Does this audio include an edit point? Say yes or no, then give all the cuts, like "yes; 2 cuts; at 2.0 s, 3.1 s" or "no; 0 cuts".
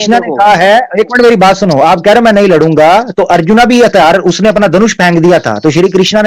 no; 0 cuts